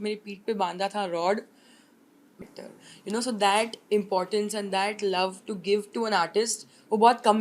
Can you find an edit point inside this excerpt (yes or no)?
yes